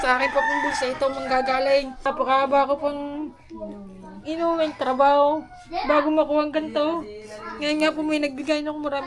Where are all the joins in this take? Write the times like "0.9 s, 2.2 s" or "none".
1.9 s